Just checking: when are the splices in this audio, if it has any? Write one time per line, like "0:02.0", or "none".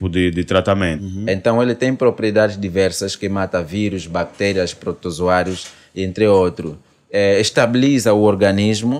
0:01.0